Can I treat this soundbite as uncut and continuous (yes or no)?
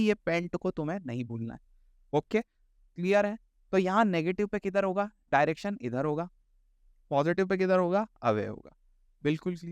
yes